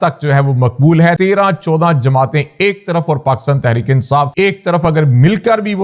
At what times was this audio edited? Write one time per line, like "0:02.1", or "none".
0:01.2
0:04.3